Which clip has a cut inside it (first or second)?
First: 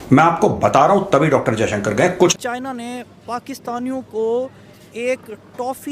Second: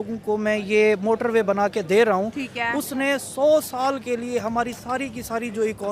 first